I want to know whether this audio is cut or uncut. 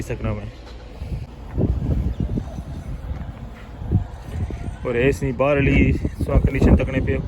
cut